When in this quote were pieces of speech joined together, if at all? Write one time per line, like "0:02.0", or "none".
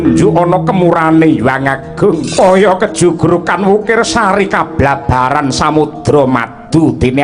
0:02.3